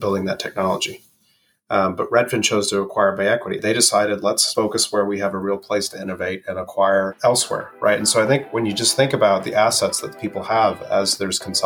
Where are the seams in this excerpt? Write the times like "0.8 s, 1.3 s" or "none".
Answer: 3.6 s, 4.5 s, 7.1 s